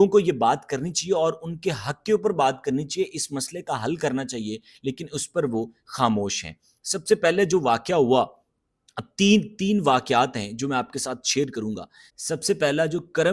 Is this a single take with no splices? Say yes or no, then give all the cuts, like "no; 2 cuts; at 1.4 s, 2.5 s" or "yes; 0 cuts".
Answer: yes; 0 cuts